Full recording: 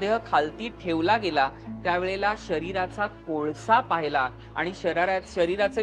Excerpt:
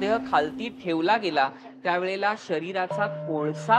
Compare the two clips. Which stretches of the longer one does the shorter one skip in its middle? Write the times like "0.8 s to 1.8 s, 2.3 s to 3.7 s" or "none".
none